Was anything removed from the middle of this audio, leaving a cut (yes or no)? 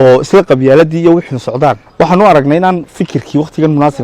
yes